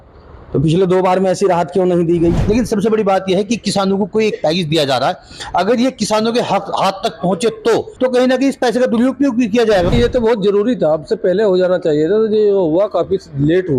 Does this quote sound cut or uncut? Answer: cut